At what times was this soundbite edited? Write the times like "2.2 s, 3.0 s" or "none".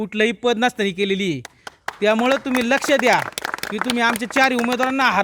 none